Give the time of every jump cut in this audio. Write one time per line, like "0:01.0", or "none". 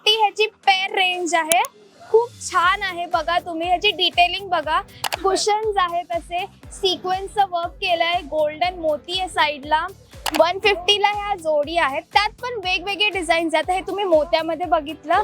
0:04.9
0:10.2